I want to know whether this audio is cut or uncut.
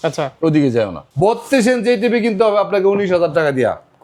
cut